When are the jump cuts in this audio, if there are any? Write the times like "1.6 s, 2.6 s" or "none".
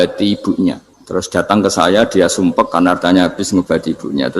0.9 s

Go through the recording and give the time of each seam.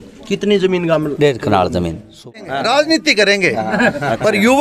2.3 s

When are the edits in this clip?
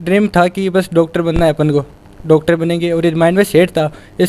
none

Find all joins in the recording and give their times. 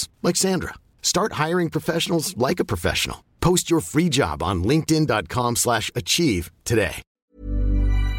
7.1 s

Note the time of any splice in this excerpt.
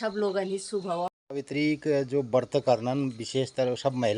1.1 s

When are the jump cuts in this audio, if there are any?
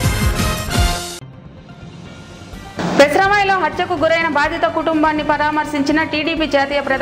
2.6 s

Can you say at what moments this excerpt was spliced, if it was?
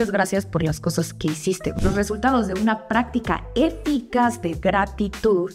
1.8 s

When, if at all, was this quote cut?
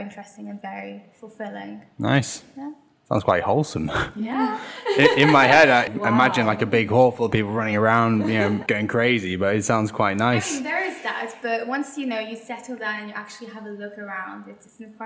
5.9 s, 8.6 s

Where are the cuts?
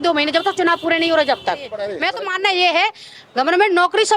1.9 s

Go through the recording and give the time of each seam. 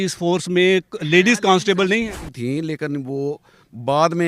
2.2 s

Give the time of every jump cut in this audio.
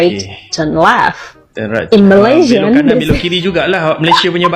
none

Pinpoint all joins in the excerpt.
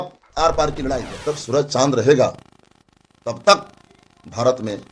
1.1 s

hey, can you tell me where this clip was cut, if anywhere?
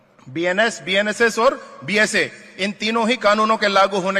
none

